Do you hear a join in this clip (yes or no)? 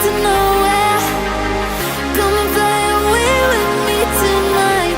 no